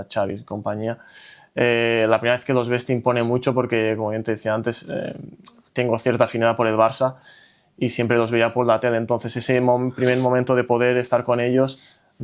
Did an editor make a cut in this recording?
no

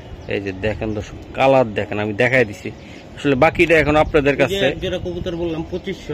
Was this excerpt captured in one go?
yes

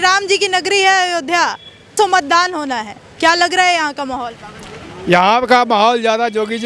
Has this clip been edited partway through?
yes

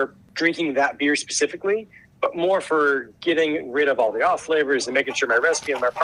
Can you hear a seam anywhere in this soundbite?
no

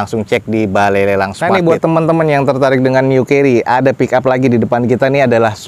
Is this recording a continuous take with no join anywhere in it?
no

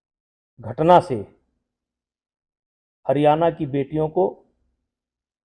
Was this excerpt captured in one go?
yes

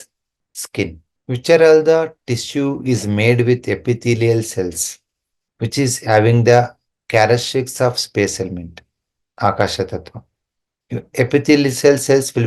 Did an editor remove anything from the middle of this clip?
no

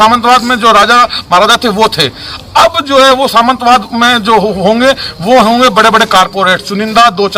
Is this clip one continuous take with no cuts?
yes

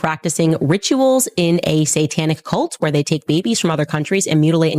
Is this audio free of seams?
yes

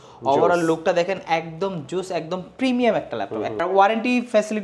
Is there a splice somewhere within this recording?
yes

